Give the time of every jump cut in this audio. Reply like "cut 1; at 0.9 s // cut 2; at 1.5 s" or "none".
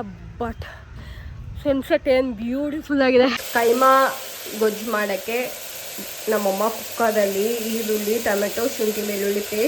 cut 1; at 3.4 s